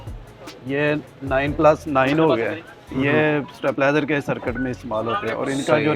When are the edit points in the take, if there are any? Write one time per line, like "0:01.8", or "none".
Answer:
none